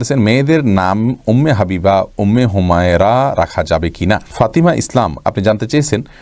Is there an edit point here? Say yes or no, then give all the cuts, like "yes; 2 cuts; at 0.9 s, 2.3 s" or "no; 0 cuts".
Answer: yes; 1 cut; at 4.3 s